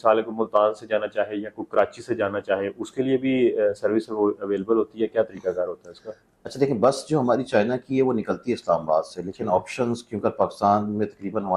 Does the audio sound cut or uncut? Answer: uncut